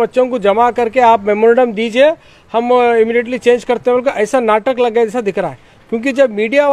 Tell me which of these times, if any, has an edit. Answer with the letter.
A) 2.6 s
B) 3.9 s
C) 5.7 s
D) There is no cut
D